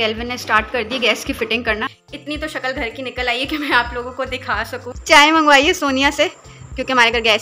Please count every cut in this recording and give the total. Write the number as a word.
two